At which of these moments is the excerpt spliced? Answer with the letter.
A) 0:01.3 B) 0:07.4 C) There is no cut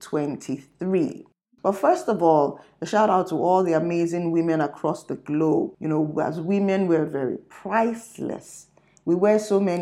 A